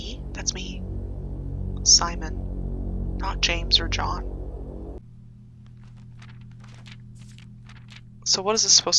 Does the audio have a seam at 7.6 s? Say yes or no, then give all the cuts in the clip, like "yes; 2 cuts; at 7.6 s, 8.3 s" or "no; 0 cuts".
no; 1 cut; at 5.0 s